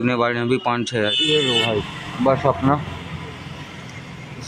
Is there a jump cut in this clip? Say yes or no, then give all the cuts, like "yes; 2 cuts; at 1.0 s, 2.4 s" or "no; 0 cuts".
yes; 1 cut; at 1.1 s